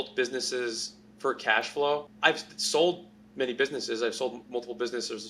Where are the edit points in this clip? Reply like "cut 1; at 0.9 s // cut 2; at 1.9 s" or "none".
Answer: cut 1; at 2.1 s